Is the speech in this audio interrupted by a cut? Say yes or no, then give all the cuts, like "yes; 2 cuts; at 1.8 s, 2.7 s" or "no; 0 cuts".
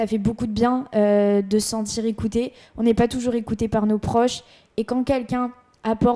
no; 0 cuts